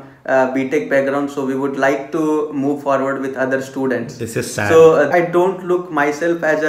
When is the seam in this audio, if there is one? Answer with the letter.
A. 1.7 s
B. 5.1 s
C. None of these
B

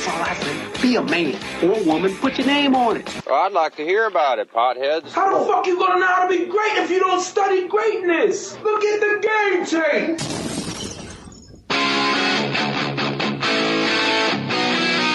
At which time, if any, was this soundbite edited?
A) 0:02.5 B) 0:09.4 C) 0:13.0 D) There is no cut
C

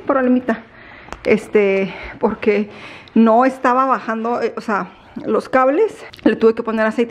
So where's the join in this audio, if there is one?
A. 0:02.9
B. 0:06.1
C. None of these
B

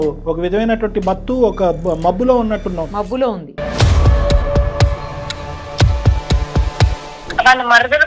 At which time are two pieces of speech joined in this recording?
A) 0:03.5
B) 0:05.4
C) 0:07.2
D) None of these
C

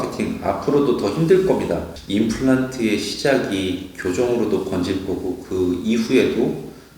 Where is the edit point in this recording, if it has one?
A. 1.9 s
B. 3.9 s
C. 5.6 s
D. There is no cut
A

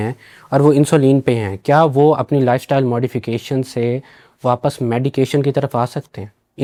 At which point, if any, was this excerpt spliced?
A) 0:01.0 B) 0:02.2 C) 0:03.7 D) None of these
D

